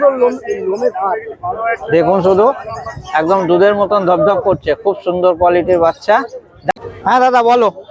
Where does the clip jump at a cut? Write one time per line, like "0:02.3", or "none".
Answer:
0:06.7